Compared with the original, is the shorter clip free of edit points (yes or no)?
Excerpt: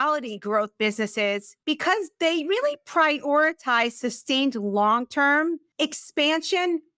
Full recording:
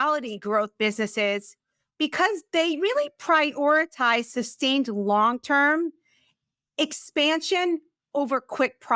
no